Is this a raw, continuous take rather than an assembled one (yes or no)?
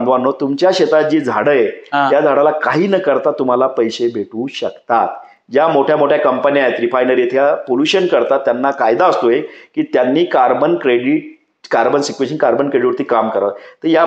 yes